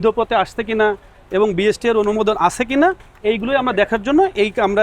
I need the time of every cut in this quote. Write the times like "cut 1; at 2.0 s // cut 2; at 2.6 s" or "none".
none